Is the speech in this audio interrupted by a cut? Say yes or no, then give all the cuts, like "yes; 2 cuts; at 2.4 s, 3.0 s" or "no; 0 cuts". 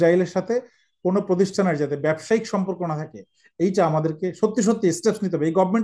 no; 0 cuts